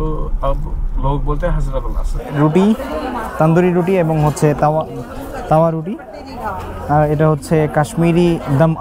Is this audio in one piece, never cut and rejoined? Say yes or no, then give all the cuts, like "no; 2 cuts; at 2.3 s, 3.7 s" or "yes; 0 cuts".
no; 1 cut; at 2.3 s